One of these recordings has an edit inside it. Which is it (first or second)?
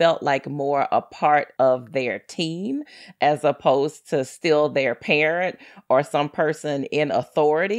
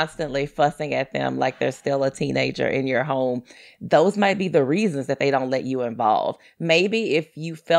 first